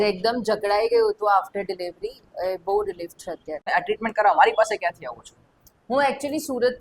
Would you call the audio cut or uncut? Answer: cut